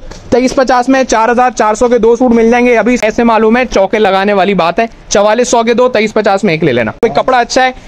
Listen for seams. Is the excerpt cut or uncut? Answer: cut